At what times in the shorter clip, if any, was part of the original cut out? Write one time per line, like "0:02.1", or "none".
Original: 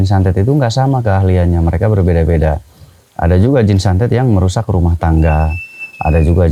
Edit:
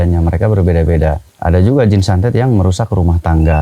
0:01.3